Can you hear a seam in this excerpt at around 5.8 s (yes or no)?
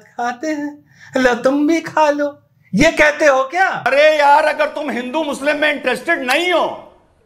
no